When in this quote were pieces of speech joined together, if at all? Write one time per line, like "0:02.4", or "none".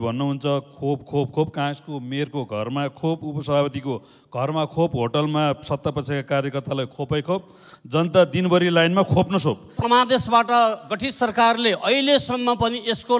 0:09.8